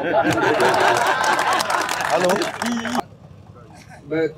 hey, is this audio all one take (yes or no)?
no